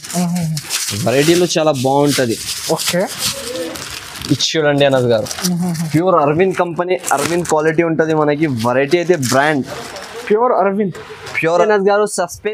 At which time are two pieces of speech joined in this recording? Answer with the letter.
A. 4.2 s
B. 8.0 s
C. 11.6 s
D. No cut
C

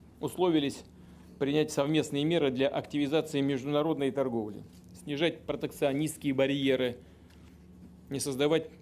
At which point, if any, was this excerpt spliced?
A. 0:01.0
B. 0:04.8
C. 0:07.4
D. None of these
B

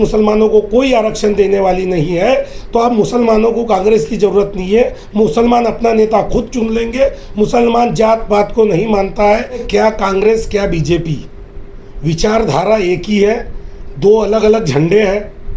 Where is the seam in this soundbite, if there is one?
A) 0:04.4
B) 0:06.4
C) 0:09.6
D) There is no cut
C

